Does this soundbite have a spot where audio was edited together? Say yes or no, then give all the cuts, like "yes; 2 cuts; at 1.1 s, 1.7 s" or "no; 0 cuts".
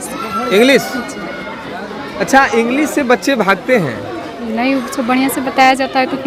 no; 0 cuts